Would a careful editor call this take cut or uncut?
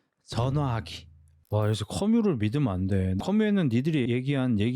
cut